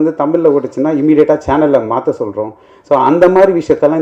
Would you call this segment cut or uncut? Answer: uncut